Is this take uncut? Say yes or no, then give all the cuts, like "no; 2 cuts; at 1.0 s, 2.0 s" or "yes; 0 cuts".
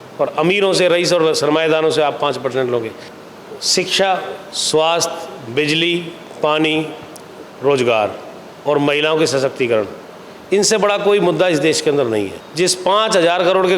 no; 2 cuts; at 3.1 s, 12.4 s